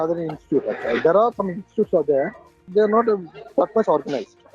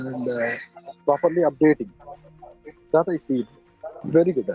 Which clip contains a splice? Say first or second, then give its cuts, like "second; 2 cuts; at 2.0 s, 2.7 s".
first; 1 cut; at 2.7 s